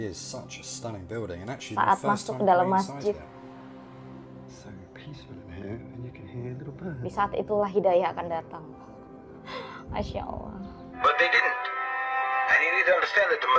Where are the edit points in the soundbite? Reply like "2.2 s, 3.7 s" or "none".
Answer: 11.0 s